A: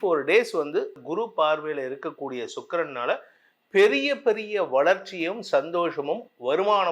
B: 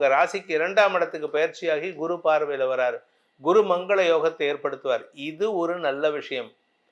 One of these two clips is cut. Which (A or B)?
A